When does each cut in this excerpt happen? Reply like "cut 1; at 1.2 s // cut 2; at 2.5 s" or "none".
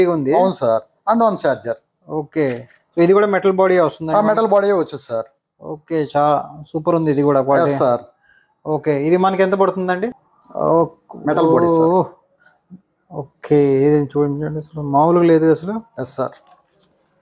cut 1; at 10.1 s

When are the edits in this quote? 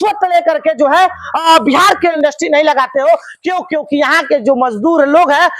cut 1; at 2.2 s

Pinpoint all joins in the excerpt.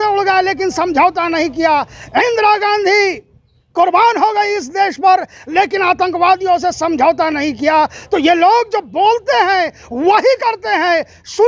none

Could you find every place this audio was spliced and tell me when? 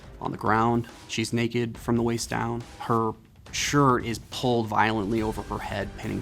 cut 1; at 1.0 s // cut 2; at 2.7 s

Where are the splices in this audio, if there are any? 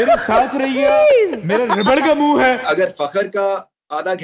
cut 1; at 2.6 s

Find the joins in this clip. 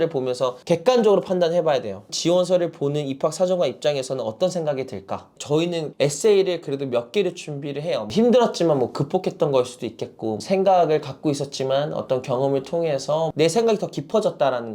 cut 1; at 5.3 s // cut 2; at 8.1 s // cut 3; at 10.4 s

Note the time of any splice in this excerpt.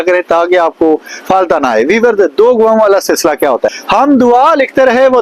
cut 1; at 3.8 s

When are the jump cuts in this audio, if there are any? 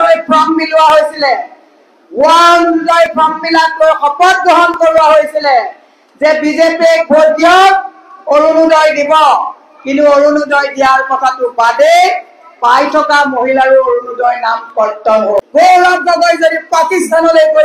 cut 1; at 15.5 s

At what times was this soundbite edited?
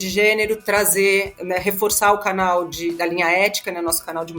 cut 1; at 1.3 s

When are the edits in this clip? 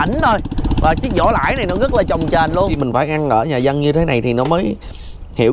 cut 1; at 2.8 s

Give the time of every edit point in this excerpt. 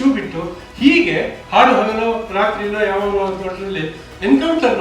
cut 1; at 1.4 s

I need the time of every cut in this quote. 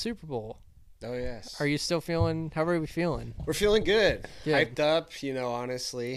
none

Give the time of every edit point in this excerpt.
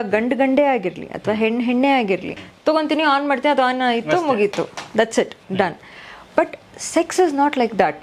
cut 1; at 2.4 s

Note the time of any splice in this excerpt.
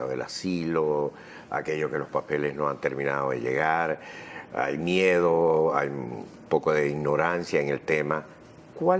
cut 1; at 4.3 s

